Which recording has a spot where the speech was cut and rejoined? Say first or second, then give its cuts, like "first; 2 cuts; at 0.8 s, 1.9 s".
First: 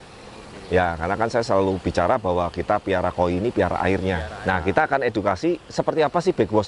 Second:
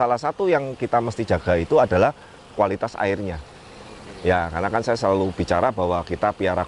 first; 1 cut; at 4.3 s